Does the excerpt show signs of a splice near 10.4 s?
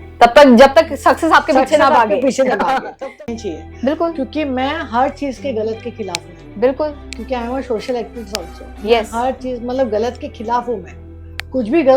no; 1 cut; at 3.1 s

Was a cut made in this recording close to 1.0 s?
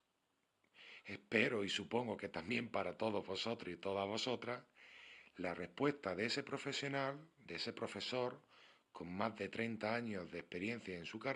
yes; 1 cut; at 1.0 s

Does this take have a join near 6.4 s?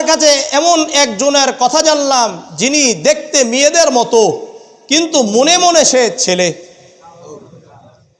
no; 0 cuts

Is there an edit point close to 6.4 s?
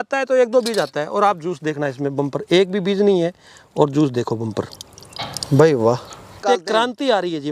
yes; 1 cut; at 6.4 s

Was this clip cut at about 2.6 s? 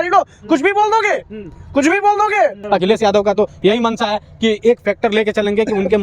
yes; 1 cut; at 2.6 s

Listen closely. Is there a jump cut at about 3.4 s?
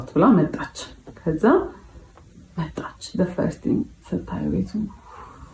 no; 0 cuts

